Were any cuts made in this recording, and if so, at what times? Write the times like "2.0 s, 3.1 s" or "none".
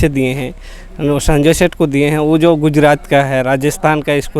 none

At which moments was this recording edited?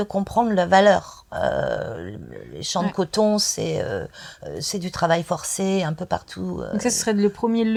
none

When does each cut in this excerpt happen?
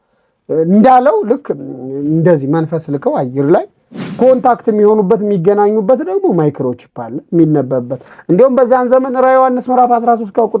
4.0 s

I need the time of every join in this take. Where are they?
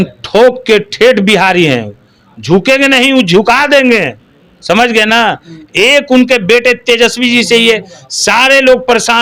none

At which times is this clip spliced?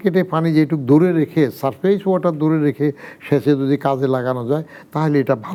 none

